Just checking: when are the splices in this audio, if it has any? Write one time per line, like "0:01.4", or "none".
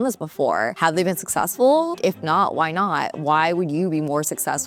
none